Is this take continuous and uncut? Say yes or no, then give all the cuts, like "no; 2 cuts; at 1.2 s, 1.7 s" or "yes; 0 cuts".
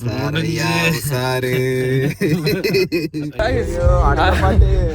no; 1 cut; at 3.2 s